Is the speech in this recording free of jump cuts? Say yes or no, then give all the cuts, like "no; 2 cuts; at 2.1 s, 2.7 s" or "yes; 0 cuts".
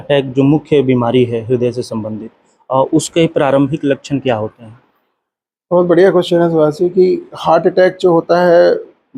yes; 0 cuts